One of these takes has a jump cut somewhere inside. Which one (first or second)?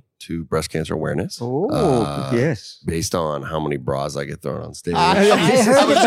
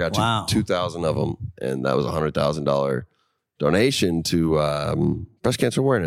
first